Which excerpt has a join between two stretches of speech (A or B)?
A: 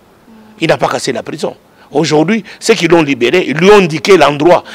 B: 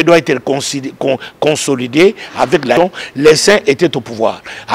B